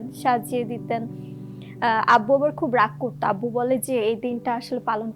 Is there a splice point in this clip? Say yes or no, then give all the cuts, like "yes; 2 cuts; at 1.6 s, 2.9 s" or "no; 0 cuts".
no; 0 cuts